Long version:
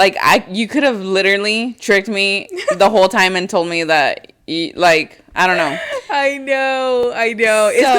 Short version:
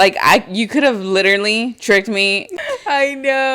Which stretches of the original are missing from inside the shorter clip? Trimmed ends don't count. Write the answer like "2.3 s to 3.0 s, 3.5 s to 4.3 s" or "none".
2.5 s to 5.8 s